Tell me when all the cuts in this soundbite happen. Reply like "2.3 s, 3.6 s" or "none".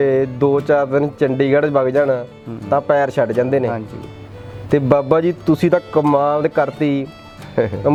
none